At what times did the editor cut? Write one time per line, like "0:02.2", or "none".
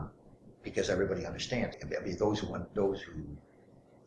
0:01.8